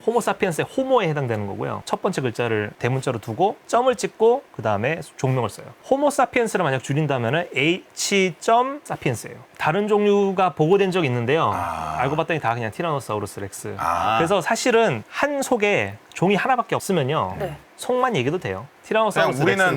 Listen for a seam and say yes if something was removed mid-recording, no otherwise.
yes